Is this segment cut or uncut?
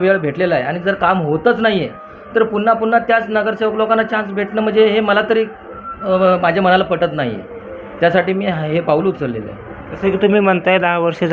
uncut